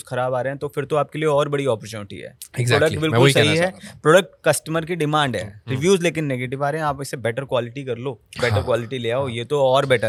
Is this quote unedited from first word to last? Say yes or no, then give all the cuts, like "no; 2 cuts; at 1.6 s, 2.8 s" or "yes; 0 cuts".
yes; 0 cuts